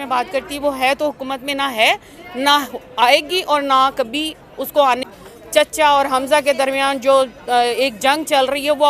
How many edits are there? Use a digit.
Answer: 1